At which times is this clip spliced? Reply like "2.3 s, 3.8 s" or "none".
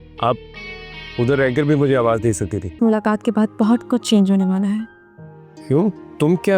2.8 s